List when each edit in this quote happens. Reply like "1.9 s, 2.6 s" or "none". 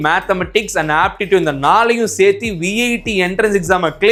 none